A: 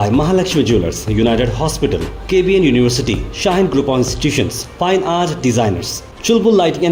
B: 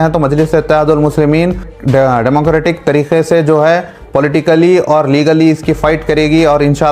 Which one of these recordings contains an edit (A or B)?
B